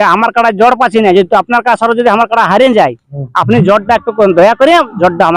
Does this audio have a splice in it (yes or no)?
no